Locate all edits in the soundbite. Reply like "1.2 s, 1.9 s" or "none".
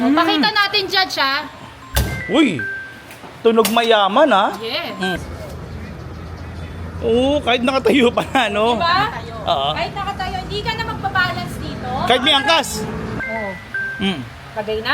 5.2 s, 13.1 s